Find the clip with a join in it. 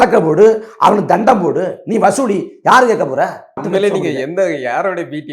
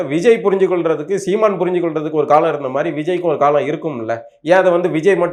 first; 1 cut; at 3.6 s

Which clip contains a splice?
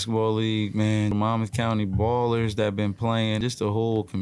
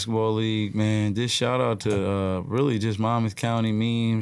first; 2 cuts; at 1.1 s, 3.4 s

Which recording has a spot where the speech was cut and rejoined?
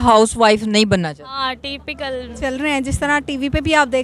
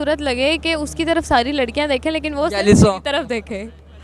first; 1 cut; at 2.4 s

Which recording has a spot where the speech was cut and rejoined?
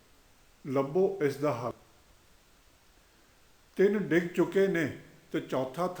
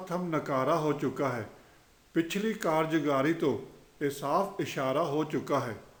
first; 1 cut; at 1.7 s

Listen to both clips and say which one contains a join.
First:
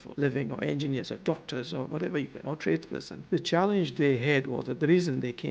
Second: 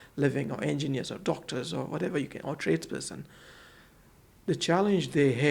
first; 1 cut; at 3.1 s

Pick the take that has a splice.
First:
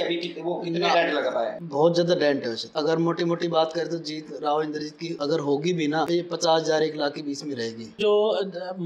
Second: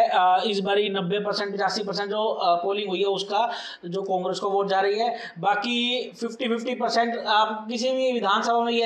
first; 5 cuts; at 1.6 s, 2.6 s, 5.1 s, 6.1 s, 7.9 s

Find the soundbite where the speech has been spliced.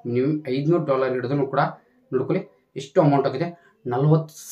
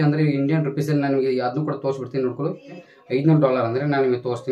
second; 1 cut; at 2.9 s

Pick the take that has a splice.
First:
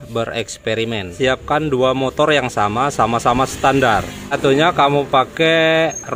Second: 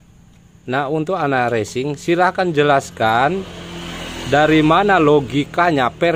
first; 2 cuts; at 1.1 s, 4.7 s

